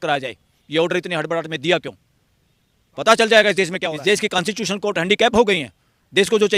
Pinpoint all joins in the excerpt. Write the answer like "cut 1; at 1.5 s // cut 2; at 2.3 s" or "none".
cut 1; at 3.9 s

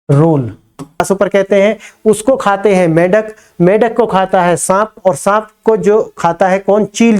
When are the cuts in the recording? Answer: cut 1; at 1.0 s

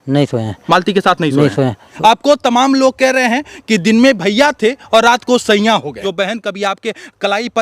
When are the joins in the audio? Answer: cut 1; at 1.9 s // cut 2; at 6.0 s

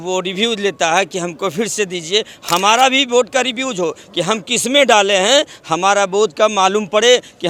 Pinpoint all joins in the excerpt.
none

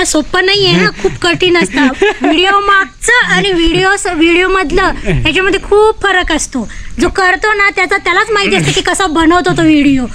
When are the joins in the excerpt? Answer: none

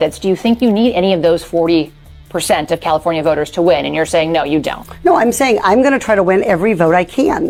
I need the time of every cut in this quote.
none

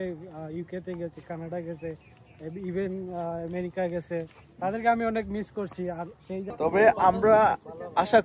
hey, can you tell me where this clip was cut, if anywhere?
cut 1; at 6.4 s

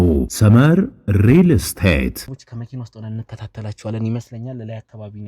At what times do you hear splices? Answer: cut 1; at 2.3 s

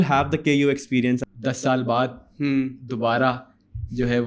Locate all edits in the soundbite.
cut 1; at 1.2 s

